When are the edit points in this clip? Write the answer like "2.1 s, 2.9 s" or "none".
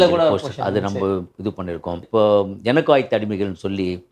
2.1 s